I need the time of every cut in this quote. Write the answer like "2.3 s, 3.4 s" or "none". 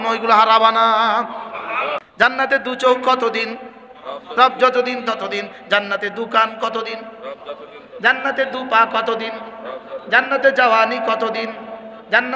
2.0 s